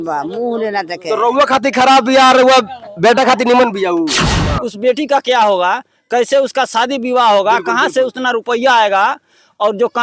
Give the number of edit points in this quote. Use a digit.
1